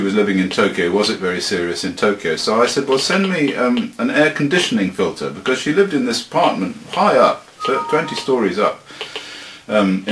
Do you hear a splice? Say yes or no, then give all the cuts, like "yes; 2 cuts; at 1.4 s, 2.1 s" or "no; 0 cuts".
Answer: yes; 1 cut; at 7.5 s